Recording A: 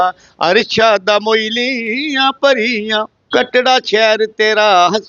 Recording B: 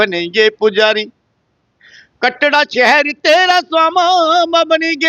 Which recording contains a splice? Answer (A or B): A